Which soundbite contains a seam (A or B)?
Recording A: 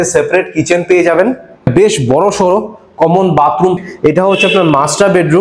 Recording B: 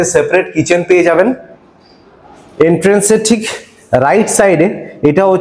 A